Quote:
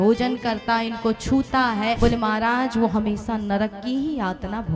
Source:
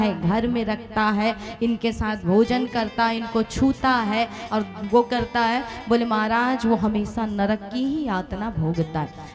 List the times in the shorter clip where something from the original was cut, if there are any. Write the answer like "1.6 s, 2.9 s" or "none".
2.0 s

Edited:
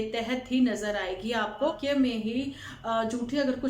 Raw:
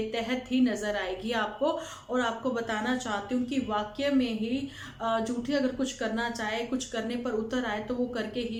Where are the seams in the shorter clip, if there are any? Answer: 1.8 s

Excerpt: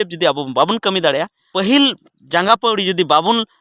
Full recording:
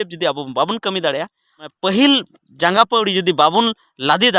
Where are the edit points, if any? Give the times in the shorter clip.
1.4 s

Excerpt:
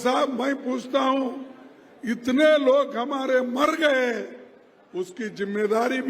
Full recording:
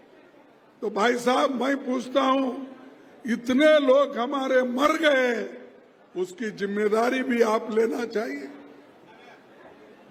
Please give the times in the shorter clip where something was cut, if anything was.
none

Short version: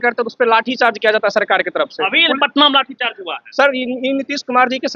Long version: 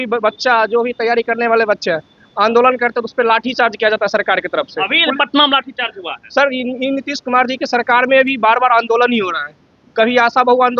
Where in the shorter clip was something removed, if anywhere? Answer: none

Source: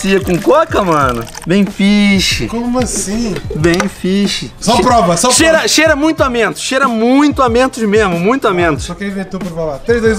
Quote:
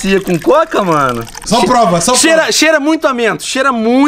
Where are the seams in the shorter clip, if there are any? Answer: 1.3 s

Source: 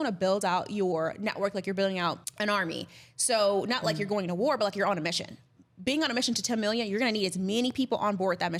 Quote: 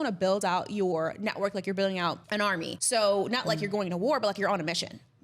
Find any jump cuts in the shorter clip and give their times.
2.3 s

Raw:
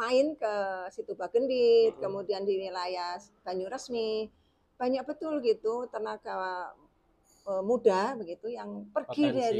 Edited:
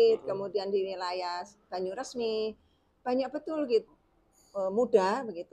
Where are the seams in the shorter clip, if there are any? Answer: 3.9 s

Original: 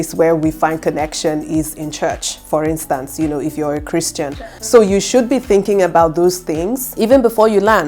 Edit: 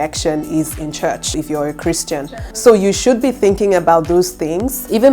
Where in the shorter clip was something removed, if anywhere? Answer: 1.3 s

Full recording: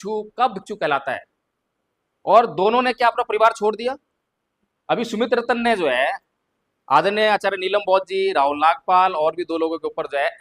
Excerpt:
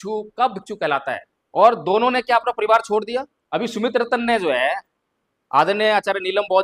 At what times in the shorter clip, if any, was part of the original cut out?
1.3 s, 3.4 s

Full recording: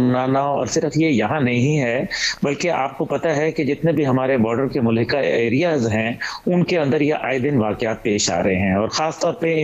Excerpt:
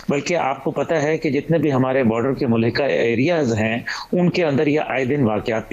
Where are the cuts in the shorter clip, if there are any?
none

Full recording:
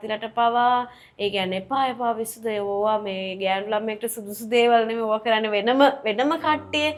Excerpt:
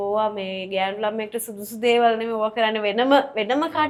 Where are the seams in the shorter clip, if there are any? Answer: none

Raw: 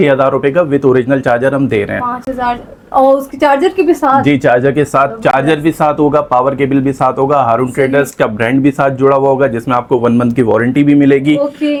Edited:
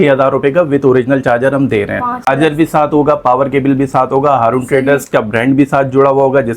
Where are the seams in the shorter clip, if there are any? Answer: 2.3 s

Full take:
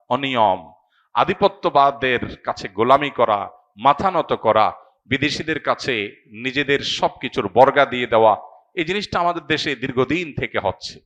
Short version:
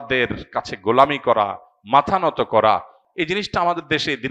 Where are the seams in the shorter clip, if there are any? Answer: 3.0 s

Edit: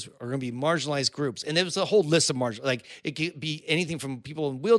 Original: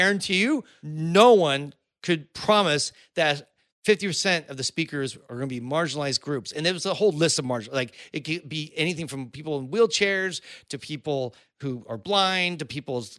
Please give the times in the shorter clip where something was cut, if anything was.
none

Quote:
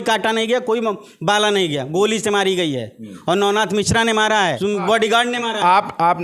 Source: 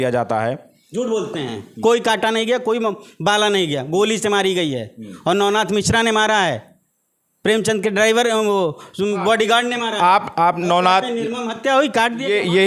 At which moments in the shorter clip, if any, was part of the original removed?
4.6 s

